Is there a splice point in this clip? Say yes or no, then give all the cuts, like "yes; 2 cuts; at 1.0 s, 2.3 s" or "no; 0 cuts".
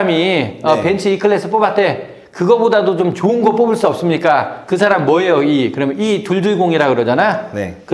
yes; 1 cut; at 4.6 s